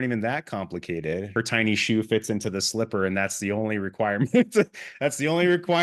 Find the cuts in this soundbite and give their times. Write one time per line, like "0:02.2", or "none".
0:01.3